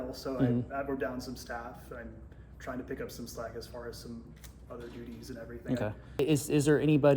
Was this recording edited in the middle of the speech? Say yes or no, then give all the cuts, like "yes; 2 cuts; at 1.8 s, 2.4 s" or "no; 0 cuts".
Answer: yes; 1 cut; at 6.2 s